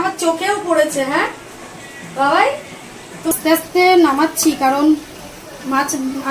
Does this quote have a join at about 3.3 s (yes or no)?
yes